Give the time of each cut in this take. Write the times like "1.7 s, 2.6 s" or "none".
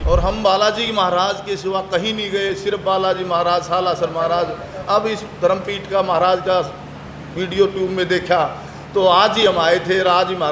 none